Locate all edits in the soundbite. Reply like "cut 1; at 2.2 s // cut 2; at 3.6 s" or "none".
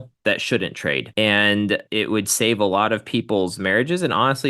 cut 1; at 1.1 s // cut 2; at 1.9 s